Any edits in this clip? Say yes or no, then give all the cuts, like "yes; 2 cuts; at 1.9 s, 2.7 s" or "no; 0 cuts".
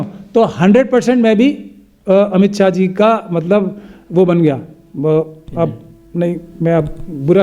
no; 0 cuts